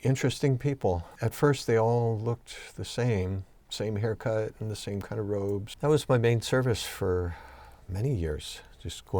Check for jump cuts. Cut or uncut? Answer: cut